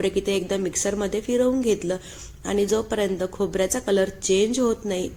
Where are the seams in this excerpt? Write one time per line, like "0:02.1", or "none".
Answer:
none